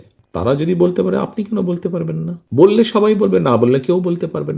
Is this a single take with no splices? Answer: no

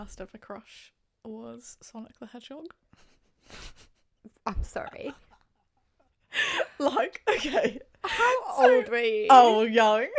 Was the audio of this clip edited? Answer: no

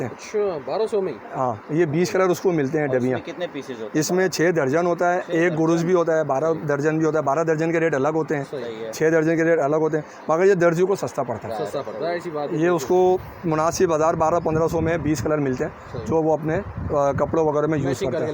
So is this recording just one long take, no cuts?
yes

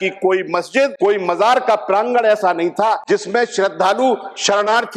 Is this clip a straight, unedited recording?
no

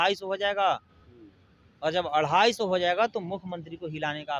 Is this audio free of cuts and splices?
yes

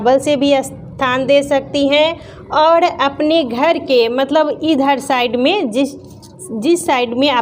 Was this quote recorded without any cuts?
yes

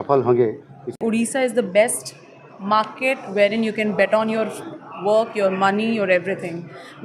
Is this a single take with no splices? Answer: no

